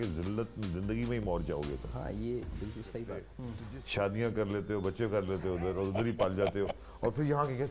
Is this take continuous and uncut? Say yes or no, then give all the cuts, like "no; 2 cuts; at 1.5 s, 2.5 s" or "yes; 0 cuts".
no; 1 cut; at 3.4 s